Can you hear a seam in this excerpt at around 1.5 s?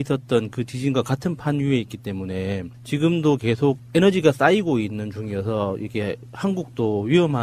yes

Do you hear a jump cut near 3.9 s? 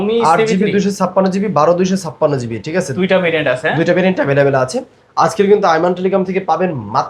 no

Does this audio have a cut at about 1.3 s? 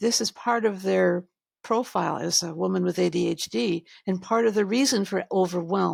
no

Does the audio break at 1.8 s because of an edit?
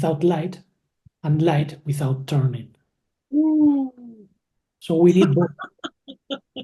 no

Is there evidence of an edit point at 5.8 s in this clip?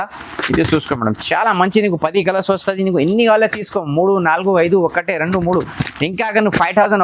no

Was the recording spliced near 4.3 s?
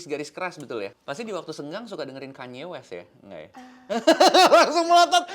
no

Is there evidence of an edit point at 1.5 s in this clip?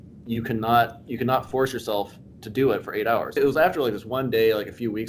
no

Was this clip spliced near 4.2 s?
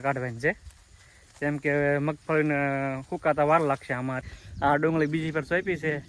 yes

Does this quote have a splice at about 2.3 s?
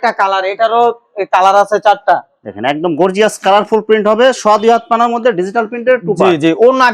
no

